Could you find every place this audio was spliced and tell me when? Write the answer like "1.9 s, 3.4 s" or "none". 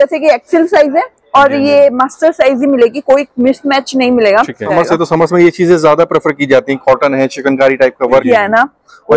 4.7 s, 8.2 s